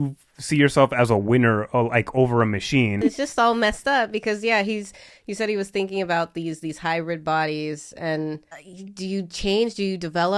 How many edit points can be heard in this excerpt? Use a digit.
2